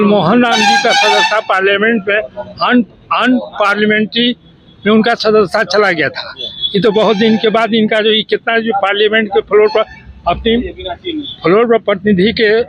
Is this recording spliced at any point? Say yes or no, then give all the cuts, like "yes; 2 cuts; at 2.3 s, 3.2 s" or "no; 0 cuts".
no; 0 cuts